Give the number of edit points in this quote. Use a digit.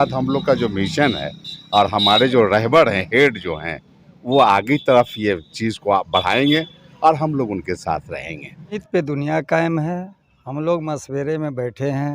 1